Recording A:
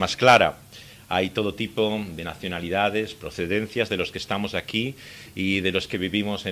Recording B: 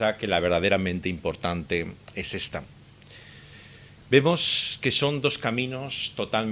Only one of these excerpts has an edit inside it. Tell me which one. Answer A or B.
A